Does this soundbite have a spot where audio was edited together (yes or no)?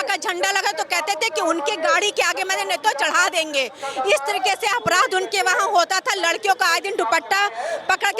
no